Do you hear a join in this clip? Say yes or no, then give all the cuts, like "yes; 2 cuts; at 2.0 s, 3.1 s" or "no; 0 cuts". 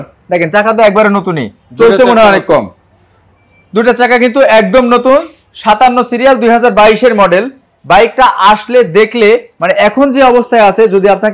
no; 0 cuts